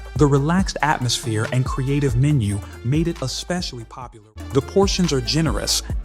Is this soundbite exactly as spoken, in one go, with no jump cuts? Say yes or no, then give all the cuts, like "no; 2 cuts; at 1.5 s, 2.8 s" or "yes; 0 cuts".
no; 1 cut; at 4.1 s